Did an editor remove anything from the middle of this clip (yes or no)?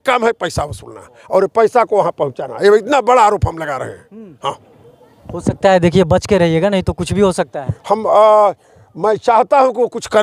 no